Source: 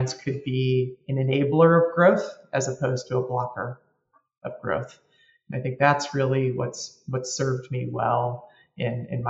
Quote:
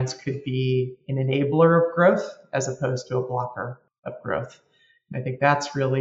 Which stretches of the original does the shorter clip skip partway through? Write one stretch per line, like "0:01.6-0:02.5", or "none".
0:03.9-0:04.2